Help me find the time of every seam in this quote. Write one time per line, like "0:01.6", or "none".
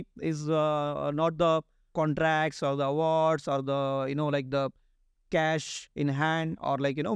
0:01.8

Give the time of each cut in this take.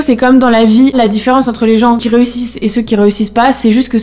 0:00.9
0:02.0

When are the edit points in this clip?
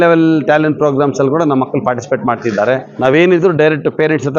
0:02.9

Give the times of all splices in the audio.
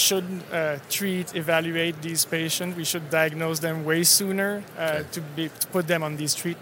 none

